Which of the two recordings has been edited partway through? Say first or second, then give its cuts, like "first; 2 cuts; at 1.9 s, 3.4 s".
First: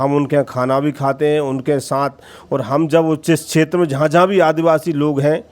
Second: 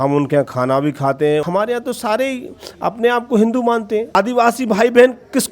second; 2 cuts; at 1.4 s, 4.1 s